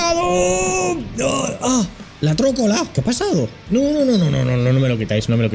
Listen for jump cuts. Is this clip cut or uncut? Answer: cut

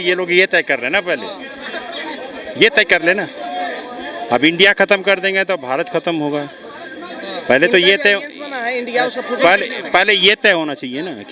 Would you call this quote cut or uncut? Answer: uncut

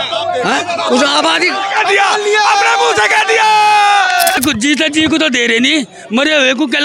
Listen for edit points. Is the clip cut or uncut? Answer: cut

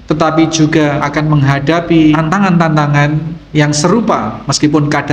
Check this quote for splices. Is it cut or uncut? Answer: cut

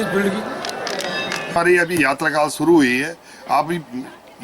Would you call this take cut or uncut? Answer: cut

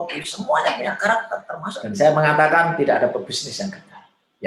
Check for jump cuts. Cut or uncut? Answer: cut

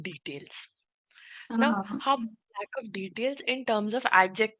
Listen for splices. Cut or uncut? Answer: uncut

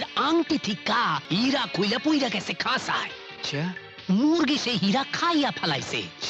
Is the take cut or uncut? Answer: cut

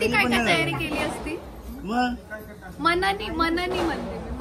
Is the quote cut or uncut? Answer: uncut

